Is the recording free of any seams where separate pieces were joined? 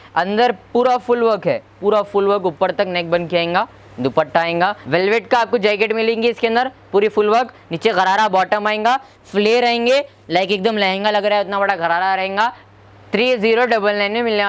yes; 0 cuts

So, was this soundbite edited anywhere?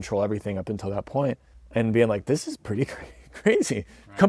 yes; 1 cut; at 1.5 s

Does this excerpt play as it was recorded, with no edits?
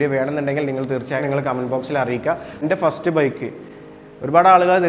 no; 1 cut; at 2.6 s

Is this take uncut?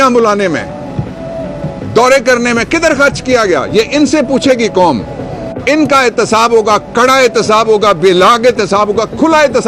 yes; 0 cuts

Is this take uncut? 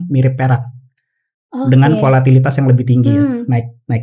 yes; 0 cuts

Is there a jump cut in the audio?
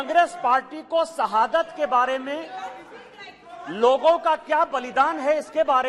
no; 0 cuts

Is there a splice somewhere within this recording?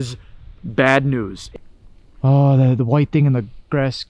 yes; 1 cut; at 1.4 s

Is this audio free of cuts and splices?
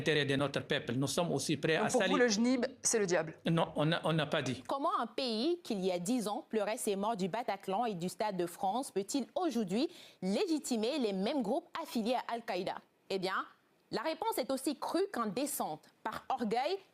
no; 2 cuts; at 4.6 s, 12.9 s

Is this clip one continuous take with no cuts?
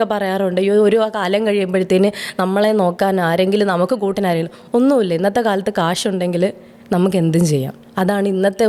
yes; 0 cuts

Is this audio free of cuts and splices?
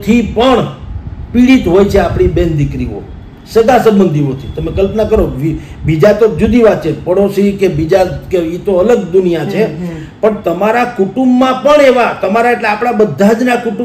yes; 0 cuts

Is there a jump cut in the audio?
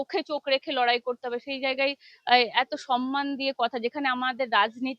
no; 0 cuts

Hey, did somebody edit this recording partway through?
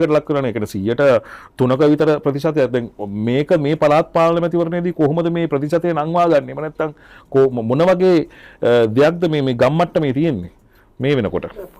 no; 0 cuts

